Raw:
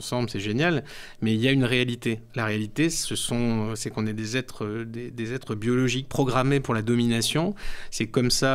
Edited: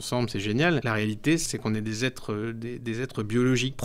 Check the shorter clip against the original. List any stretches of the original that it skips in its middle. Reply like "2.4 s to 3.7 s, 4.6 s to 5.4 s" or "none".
1.2 s to 3.6 s